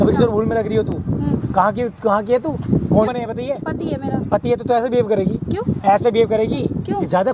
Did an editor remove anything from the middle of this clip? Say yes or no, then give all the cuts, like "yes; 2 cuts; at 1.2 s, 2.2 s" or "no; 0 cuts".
no; 0 cuts